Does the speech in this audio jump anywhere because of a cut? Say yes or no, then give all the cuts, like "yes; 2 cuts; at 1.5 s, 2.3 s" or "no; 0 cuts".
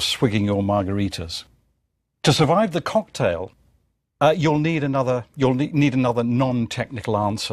yes; 1 cut; at 5.3 s